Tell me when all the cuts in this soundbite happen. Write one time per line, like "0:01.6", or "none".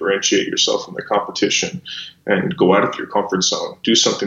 none